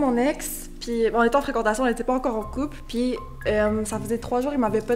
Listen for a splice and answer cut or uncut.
uncut